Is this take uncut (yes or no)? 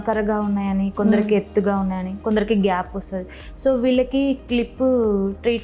yes